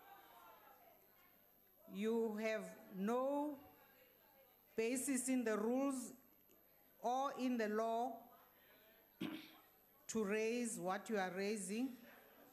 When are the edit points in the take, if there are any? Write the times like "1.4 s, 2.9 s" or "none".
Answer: 6.7 s